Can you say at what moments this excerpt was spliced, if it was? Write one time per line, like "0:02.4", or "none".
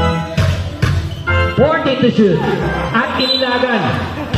none

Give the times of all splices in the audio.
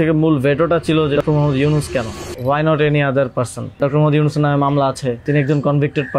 0:01.2
0:02.2
0:03.8
0:05.2

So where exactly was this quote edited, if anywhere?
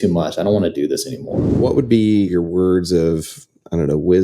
0:01.5
0:02.3

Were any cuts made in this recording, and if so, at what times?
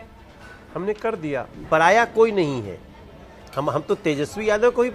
0:01.5

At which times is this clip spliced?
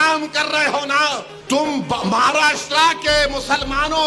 0:01.3

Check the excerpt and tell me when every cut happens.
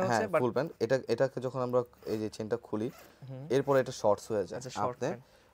none

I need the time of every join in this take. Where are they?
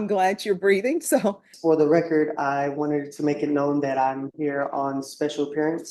0:01.5

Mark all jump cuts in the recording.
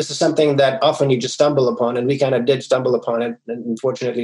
none

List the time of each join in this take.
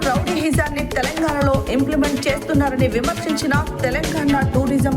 none

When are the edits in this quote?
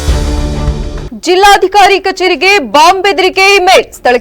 0:01.0

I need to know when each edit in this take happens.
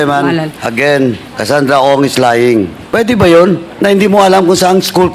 0:01.3
0:02.8
0:03.7

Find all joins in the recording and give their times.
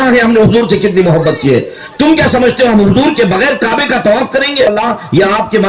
0:04.7

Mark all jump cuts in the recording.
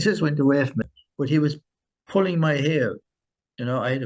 0:01.0

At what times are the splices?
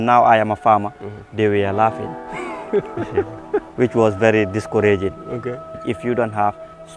0:05.8

